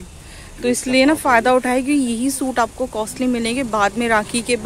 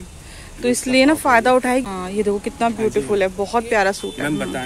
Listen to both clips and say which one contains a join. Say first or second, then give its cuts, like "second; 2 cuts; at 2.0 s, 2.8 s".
second; 1 cut; at 1.8 s